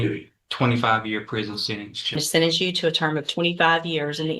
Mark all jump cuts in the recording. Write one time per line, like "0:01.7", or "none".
0:02.2